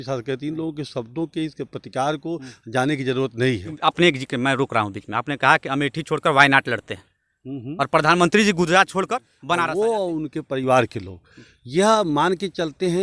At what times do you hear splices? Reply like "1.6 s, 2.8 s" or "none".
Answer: 3.7 s, 9.3 s